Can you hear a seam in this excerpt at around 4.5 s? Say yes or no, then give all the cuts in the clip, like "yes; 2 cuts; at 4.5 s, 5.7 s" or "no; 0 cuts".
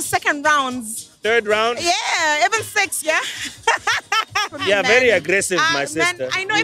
yes; 1 cut; at 4.5 s